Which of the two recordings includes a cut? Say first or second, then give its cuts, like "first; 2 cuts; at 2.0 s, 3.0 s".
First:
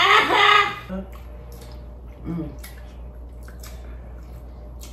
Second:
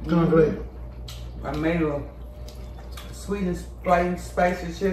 first; 1 cut; at 0.9 s